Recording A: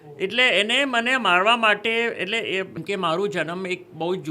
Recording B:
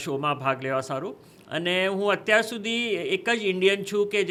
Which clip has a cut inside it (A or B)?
A